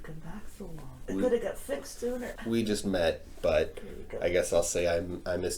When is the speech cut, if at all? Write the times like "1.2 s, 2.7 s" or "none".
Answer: 1.0 s, 2.3 s